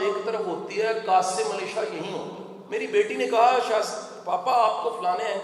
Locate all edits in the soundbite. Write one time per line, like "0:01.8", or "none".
0:02.5